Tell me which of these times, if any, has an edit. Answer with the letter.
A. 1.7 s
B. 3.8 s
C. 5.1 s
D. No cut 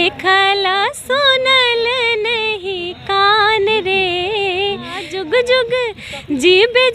C